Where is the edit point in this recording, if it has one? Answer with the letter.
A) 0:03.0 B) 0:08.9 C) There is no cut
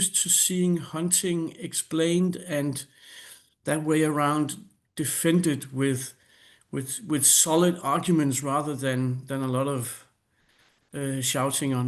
C